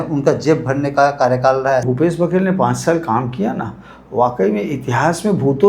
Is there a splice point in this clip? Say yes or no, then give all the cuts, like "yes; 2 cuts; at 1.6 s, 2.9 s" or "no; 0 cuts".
yes; 1 cut; at 1.8 s